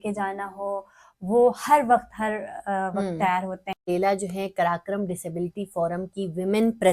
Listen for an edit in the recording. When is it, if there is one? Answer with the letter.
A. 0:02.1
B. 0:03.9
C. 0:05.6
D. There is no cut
B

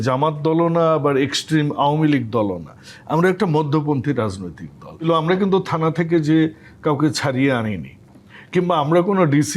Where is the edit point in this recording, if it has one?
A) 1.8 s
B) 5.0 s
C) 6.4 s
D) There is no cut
B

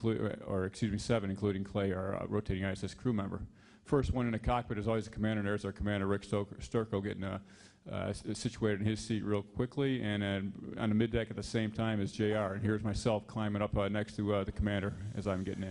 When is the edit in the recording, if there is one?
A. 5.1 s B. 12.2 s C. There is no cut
B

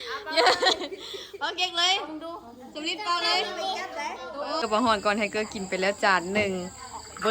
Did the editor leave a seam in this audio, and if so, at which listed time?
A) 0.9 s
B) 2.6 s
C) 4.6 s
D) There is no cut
C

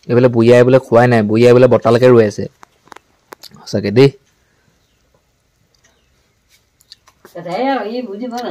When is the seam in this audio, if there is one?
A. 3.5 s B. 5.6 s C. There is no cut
C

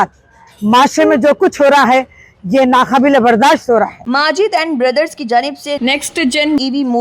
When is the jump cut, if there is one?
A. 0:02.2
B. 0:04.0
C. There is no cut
B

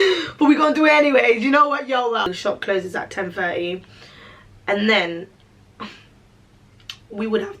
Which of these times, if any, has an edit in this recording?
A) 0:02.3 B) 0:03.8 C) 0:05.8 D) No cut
A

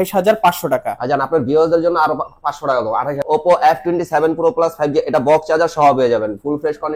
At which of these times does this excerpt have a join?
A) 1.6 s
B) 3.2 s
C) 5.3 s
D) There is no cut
B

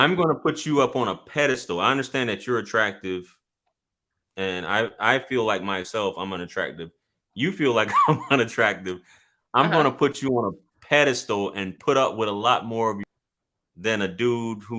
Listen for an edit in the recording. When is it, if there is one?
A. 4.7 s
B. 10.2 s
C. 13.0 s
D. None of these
C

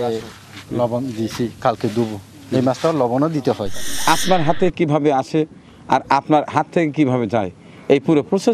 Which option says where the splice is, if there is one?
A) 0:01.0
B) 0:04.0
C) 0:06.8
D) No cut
B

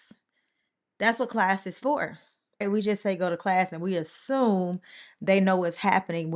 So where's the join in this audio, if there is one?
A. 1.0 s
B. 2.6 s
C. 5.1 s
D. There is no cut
B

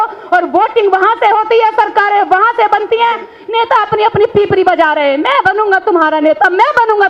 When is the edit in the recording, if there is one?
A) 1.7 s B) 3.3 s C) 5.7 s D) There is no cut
B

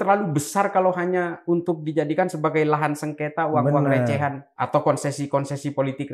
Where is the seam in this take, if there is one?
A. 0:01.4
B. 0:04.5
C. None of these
B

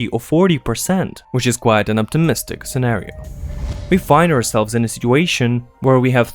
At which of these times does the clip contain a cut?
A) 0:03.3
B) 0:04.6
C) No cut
A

